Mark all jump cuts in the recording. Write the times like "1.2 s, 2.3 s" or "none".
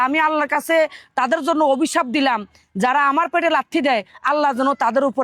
none